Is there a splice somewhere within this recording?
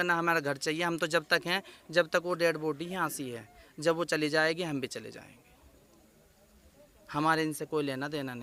no; 0 cuts

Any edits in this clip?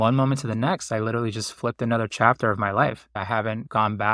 yes; 1 cut; at 3.1 s

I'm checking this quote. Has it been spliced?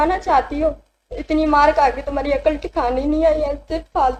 no; 0 cuts

